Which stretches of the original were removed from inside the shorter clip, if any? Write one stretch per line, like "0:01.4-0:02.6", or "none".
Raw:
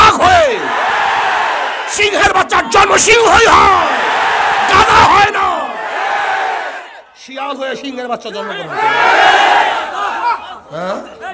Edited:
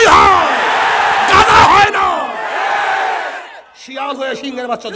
none